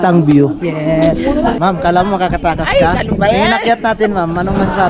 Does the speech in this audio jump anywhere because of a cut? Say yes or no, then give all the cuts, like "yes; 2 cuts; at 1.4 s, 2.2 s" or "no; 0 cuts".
yes; 1 cut; at 1.6 s